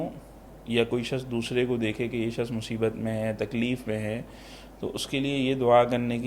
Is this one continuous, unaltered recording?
yes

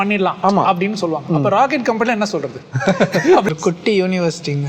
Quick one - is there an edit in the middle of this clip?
yes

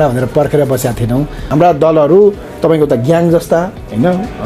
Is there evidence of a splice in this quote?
yes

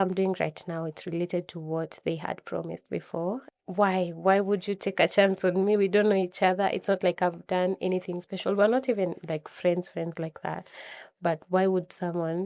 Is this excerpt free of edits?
no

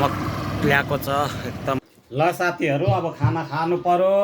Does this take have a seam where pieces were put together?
yes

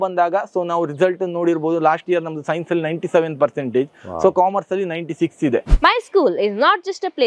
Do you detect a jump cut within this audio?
yes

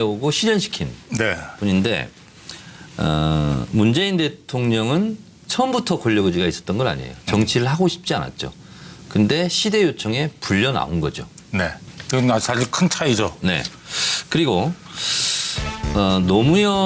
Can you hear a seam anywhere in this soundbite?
yes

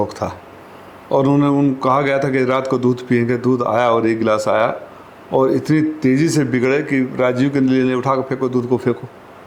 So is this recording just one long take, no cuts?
yes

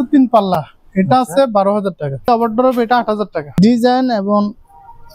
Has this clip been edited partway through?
yes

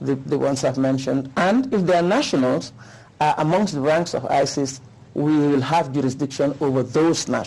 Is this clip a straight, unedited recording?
yes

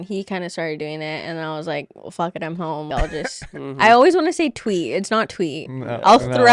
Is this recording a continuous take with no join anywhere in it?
no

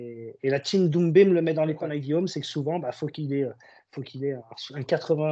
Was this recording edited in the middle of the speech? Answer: yes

